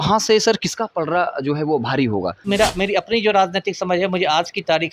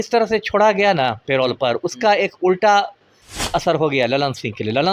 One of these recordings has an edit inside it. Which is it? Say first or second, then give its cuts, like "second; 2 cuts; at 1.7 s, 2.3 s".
first; 1 cut; at 2.4 s